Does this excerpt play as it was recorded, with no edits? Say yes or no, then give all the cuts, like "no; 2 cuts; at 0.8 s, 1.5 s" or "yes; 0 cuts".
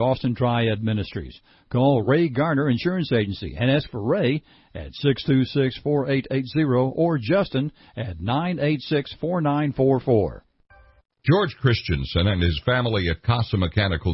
no; 1 cut; at 10.5 s